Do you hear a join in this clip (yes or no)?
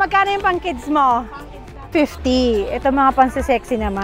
yes